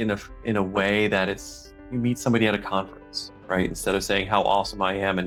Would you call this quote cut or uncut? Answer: uncut